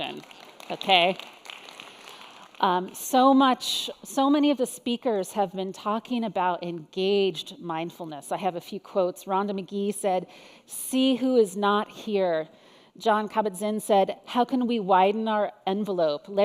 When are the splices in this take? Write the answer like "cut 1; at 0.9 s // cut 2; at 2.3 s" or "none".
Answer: cut 1; at 1.0 s